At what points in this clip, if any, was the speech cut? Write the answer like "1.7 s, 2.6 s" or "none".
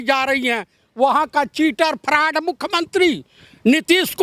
none